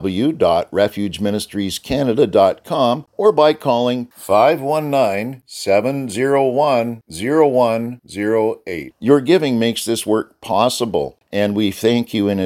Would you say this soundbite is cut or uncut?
cut